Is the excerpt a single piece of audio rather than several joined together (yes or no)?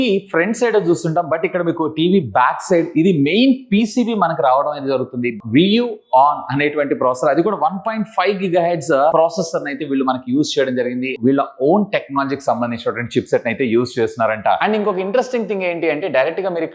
no